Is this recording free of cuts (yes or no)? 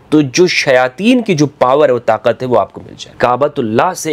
no